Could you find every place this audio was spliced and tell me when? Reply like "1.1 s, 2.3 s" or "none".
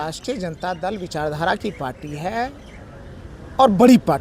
none